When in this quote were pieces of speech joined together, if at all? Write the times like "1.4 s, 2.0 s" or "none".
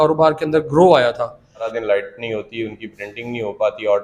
1.7 s

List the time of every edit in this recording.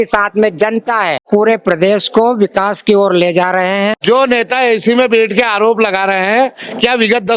1.2 s, 4.0 s

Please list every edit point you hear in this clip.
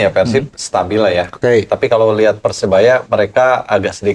none

